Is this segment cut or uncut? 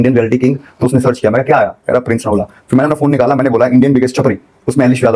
uncut